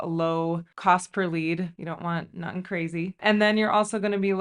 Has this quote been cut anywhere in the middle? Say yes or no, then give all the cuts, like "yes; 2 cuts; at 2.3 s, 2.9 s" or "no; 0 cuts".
no; 0 cuts